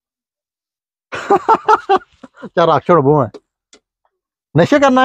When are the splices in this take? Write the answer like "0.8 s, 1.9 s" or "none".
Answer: none